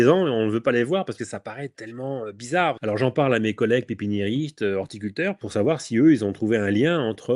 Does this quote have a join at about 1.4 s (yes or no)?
no